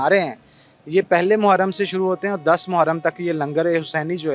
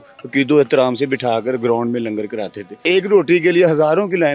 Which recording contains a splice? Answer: second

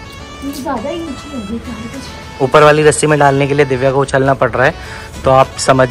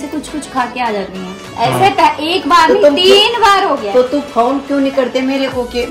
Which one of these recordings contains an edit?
first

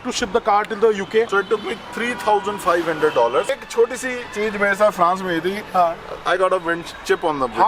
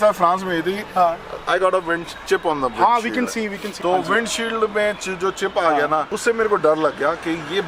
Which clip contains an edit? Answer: first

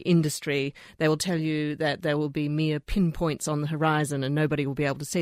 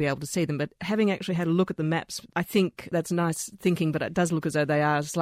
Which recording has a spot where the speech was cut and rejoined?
second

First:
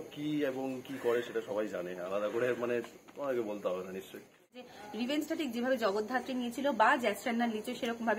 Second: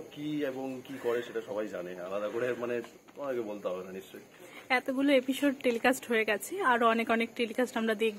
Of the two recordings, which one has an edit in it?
first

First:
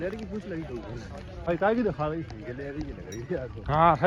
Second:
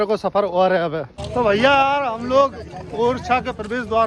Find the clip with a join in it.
second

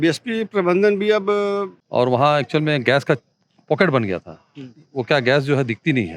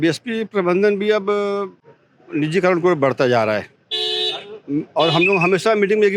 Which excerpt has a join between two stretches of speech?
first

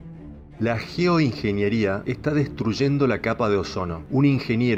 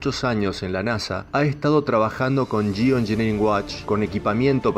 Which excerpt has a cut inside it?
second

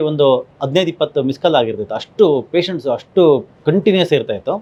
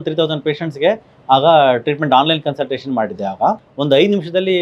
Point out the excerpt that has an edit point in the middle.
second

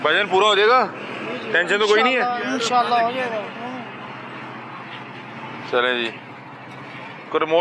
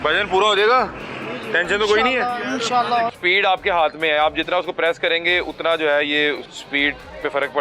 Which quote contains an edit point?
second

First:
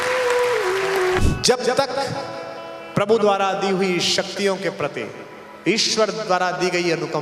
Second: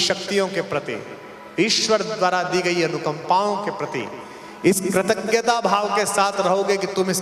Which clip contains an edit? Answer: first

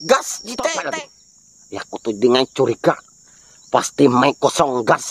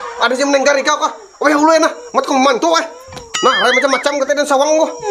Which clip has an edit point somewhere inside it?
first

